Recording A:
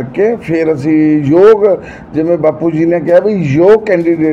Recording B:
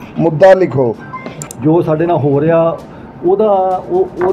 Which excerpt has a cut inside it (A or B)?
B